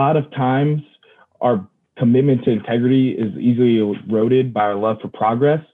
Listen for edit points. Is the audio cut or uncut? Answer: cut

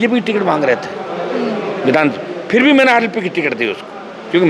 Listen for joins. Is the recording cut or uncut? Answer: uncut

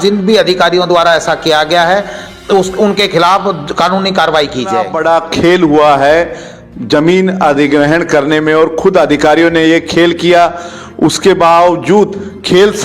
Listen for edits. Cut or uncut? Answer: cut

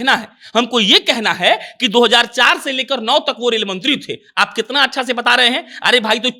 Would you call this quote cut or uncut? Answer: uncut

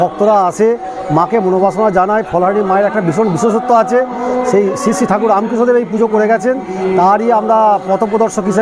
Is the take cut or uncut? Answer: uncut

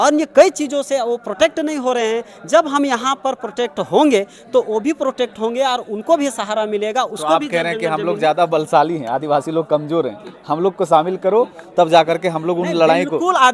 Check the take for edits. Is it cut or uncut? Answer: uncut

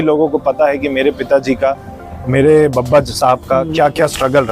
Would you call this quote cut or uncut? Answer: uncut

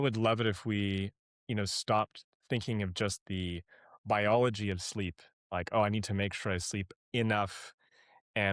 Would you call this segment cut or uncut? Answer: uncut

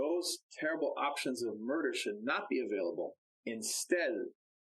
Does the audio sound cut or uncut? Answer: cut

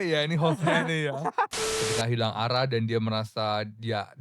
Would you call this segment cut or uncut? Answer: cut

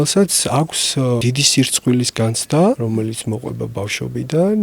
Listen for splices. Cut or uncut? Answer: cut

